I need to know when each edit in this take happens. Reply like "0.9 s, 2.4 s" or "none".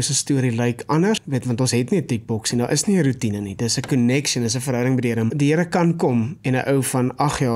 1.2 s, 5.3 s

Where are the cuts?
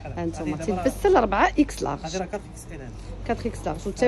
none

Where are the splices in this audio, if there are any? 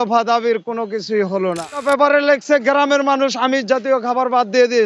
1.8 s

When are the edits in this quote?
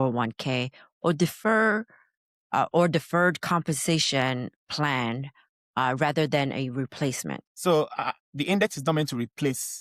7.5 s

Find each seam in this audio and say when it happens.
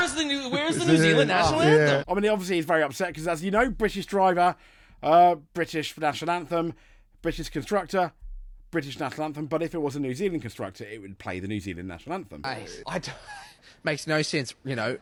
none

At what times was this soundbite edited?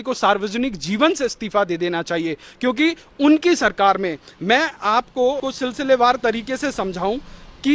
5.4 s

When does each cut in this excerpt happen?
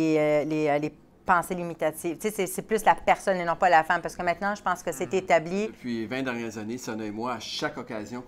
5.8 s

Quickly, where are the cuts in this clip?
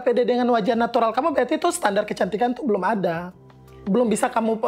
none

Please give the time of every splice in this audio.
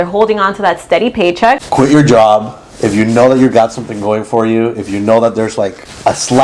1.7 s

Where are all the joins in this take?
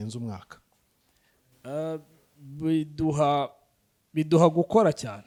none

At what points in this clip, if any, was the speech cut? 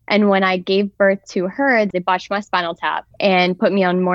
1.9 s, 3.1 s

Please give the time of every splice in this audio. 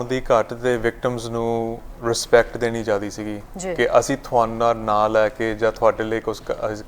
none

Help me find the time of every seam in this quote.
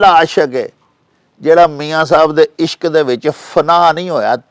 none

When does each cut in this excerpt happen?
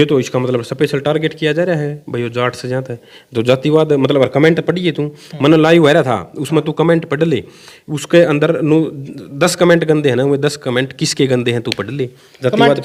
none

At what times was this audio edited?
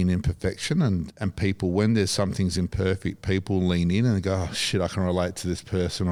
none

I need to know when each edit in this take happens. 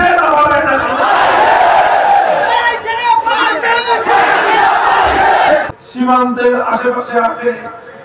5.7 s

